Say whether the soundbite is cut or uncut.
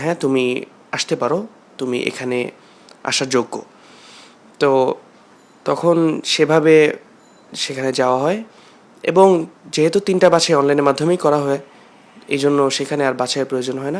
uncut